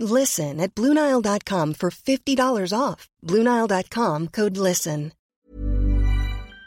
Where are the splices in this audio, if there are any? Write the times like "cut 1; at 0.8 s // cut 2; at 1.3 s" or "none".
cut 1; at 5.2 s